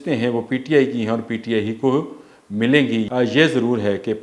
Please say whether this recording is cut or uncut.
cut